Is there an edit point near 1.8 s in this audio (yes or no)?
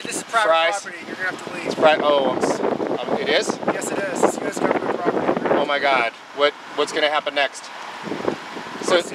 no